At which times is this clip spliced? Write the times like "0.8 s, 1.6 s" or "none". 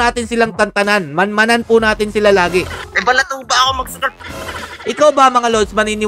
2.8 s